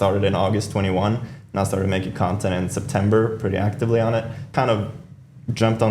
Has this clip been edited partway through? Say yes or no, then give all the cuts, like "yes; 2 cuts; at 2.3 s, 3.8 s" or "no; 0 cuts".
yes; 1 cut; at 4.5 s